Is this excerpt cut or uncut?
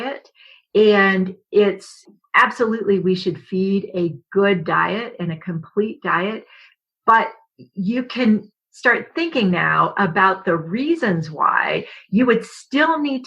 cut